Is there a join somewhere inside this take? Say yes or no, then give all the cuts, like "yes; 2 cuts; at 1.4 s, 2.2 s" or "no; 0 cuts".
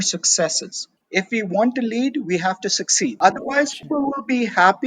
yes; 3 cuts; at 0.9 s, 3.2 s, 3.8 s